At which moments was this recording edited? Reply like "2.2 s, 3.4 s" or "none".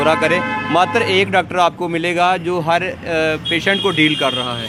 none